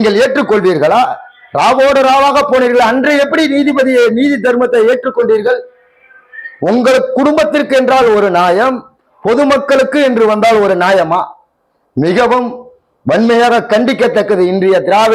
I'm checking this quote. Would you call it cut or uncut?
uncut